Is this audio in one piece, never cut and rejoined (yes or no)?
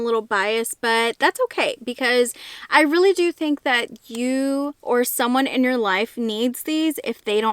yes